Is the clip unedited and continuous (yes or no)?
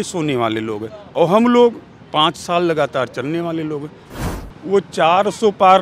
no